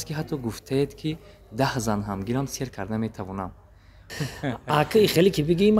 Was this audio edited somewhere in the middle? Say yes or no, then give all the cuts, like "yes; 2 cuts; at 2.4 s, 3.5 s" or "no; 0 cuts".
yes; 1 cut; at 4.1 s